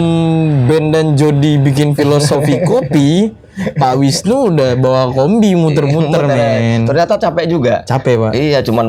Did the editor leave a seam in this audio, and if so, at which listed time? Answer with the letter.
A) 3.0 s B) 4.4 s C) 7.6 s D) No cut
D